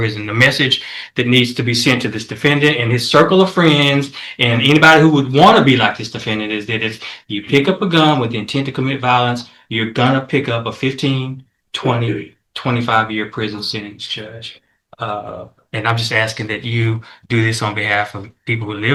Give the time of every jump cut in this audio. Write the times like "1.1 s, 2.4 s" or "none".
none